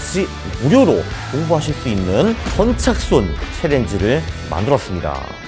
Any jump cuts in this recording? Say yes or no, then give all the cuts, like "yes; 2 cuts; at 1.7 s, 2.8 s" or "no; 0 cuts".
no; 0 cuts